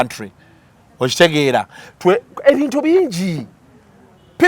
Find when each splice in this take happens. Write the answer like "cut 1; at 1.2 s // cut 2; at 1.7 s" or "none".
none